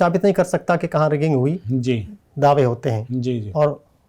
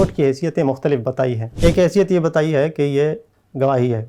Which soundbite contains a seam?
second; 1 cut; at 1.5 s

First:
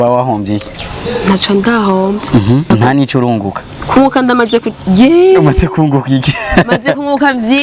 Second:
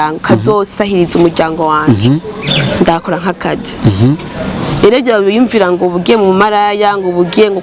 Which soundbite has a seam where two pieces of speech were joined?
first; 1 cut; at 2.7 s

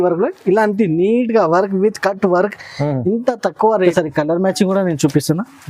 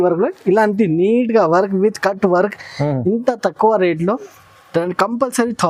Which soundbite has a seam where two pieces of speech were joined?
first; 1 cut; at 3.9 s

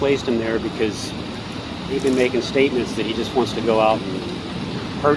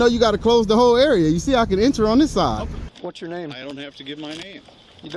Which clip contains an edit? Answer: second; 1 cut; at 2.9 s

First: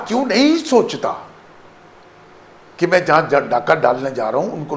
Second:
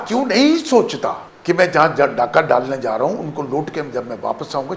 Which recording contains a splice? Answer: second; 1 cut; at 1.3 s

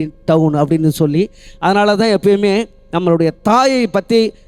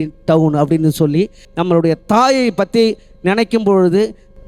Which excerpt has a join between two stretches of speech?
second; 1 cut; at 1.4 s

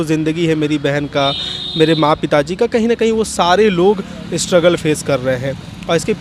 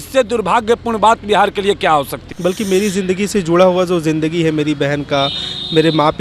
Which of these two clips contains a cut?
second; 1 cut; at 2.2 s

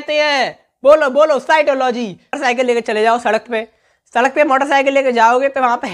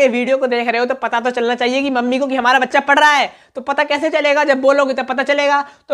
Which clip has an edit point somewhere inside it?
first; 1 cut; at 2.4 s

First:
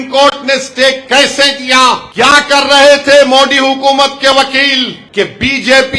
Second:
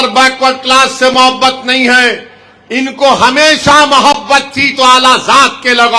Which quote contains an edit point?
first; 2 cuts; at 2.1 s, 5.0 s

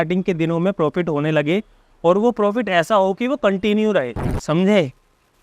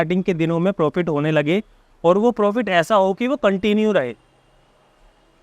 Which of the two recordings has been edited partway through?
first; 1 cut; at 4.3 s

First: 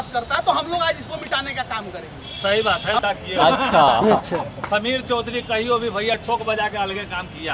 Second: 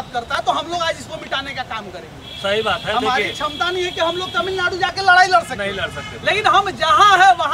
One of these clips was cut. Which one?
first; 1 cut; at 3.0 s

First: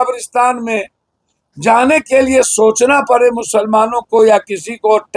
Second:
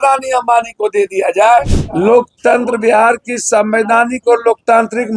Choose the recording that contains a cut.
second; 1 cut; at 1.8 s

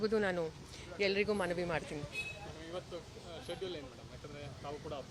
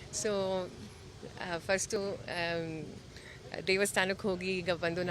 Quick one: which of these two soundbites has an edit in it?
second; 1 cut; at 1.9 s

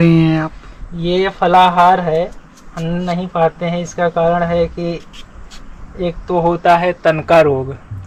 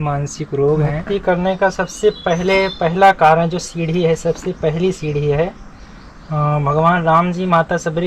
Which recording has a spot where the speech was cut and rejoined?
second; 1 cut; at 1.0 s

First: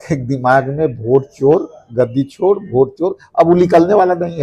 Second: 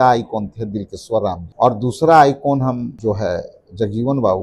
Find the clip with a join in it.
second; 2 cuts; at 1.4 s, 2.9 s

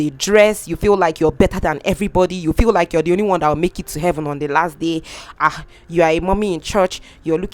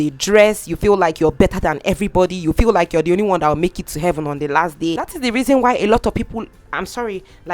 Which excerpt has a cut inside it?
second; 1 cut; at 5.0 s

